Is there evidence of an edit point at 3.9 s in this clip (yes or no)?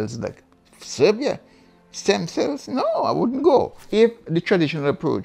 yes